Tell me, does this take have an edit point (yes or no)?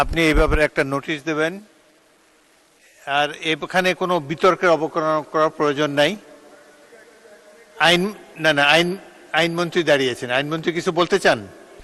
no